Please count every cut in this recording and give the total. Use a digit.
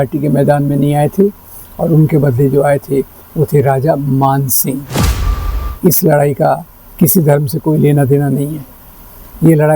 1